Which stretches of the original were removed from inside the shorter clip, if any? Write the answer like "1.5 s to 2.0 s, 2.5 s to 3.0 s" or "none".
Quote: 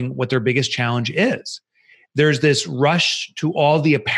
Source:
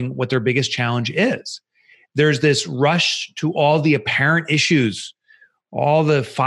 none